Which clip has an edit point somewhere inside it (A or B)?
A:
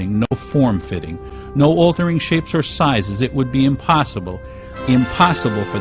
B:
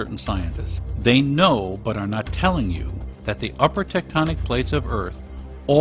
A